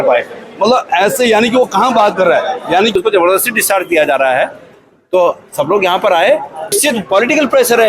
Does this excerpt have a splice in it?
yes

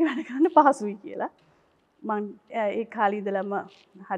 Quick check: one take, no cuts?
yes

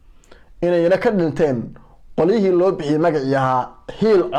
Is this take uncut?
yes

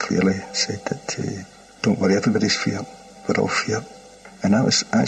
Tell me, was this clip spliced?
no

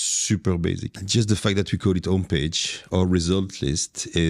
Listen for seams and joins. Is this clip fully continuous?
no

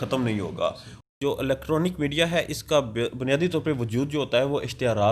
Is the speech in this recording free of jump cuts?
no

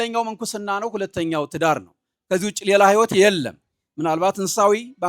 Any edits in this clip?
no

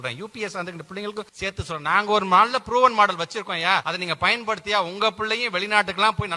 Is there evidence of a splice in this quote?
yes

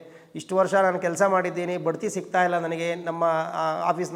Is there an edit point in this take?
no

